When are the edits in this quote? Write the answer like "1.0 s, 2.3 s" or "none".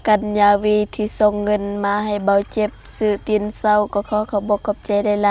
none